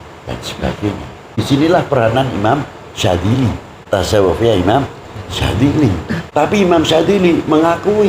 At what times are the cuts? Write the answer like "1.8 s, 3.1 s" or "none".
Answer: 1.4 s, 3.7 s, 6.2 s